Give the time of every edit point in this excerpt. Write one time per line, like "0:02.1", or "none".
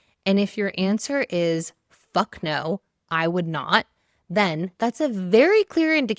none